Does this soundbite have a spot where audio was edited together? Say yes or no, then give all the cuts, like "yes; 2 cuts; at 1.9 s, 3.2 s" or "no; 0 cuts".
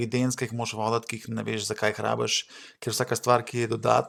no; 0 cuts